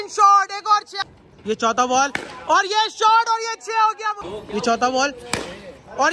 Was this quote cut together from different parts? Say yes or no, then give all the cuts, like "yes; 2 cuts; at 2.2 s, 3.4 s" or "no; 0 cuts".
yes; 2 cuts; at 1.0 s, 4.3 s